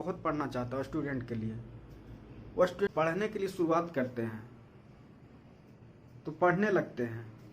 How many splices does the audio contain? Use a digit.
1